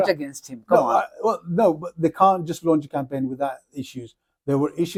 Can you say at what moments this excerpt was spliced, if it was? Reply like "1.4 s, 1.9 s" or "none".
none